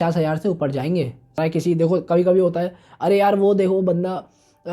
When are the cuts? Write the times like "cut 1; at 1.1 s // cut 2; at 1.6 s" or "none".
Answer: cut 1; at 1.4 s